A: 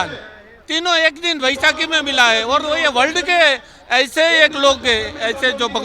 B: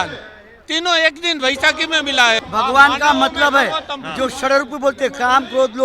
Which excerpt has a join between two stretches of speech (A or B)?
B